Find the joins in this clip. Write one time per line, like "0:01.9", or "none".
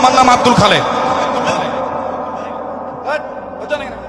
0:02.8

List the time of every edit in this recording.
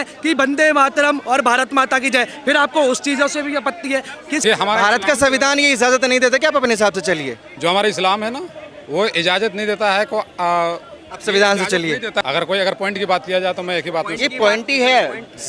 0:04.4
0:07.4
0:12.2

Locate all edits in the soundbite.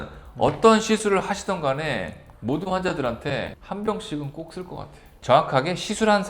0:05.0

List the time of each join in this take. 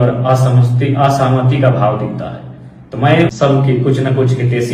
0:03.3

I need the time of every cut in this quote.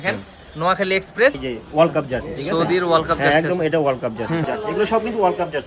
0:01.4
0:04.4

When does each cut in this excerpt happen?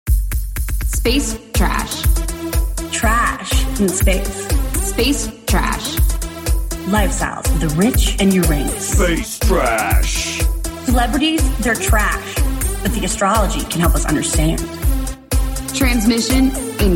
none

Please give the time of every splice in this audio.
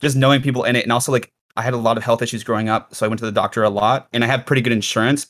0:01.4

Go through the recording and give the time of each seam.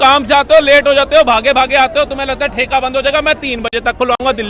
none

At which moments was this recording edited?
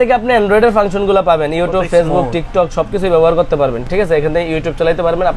none

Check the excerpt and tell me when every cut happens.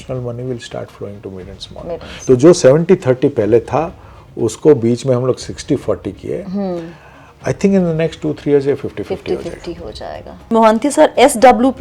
0:02.2
0:10.5

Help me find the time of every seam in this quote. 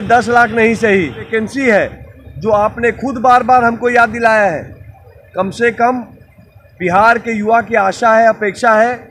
0:01.3

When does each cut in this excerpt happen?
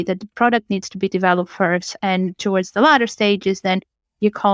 none

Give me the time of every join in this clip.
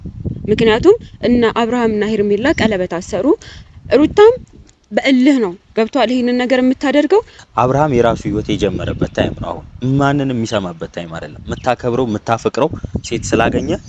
0:07.4

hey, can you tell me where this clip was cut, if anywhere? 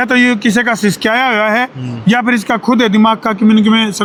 none

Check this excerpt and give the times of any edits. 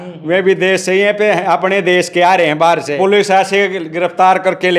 0:02.9

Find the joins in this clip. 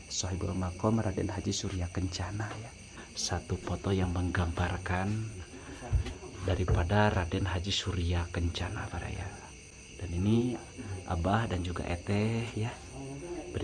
0:03.1

